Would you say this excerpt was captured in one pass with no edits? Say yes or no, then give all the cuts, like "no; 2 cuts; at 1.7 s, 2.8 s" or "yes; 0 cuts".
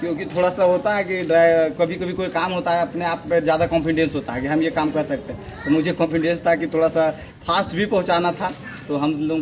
yes; 0 cuts